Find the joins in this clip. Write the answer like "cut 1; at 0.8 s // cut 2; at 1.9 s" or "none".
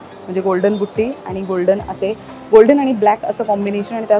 none